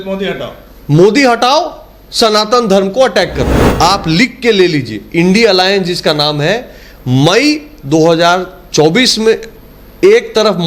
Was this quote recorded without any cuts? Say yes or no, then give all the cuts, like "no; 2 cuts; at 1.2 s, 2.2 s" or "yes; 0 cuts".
no; 1 cut; at 3.6 s